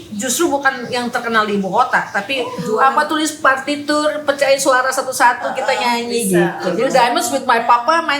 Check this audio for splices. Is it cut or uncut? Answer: cut